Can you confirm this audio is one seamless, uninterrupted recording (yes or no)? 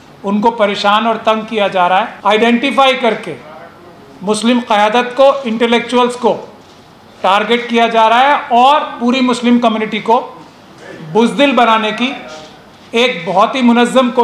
no